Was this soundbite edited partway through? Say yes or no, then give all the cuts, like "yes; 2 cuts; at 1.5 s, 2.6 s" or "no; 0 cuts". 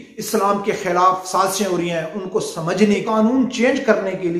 yes; 1 cut; at 3.1 s